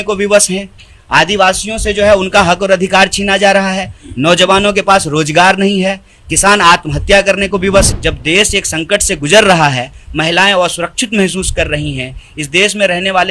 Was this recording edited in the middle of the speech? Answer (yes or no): yes